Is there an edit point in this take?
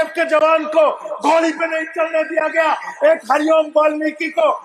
no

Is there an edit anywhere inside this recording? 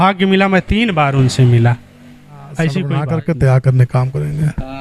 yes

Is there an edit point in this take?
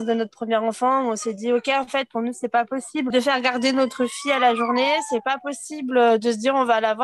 yes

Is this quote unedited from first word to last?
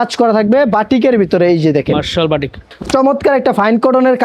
no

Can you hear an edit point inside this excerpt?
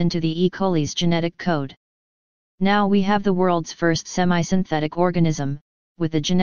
yes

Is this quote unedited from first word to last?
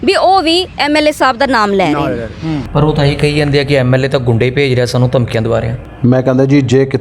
no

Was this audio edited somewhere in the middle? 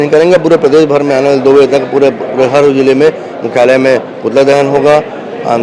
no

